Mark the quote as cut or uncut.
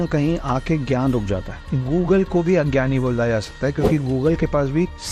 uncut